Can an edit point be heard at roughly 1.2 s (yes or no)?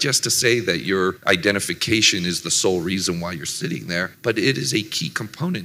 yes